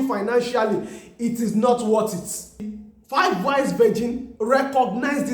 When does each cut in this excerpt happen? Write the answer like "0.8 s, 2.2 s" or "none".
2.8 s